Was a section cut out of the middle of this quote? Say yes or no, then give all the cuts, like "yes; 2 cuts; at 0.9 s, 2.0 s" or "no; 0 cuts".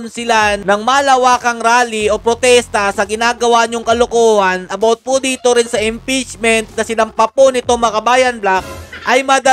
no; 0 cuts